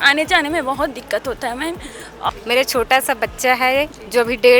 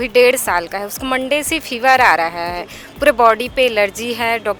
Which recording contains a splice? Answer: first; 1 cut; at 2.3 s

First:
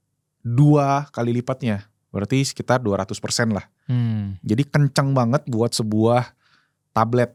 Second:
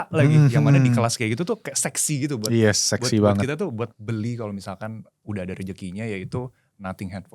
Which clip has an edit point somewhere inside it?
second; 1 cut; at 3.9 s

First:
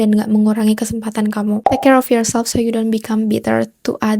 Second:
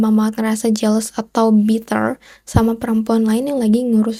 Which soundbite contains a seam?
first; 1 cut; at 1.6 s

